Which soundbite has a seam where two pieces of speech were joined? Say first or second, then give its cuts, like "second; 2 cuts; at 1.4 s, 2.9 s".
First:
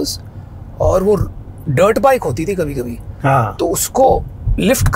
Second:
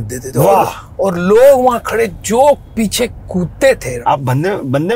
second; 1 cut; at 3.9 s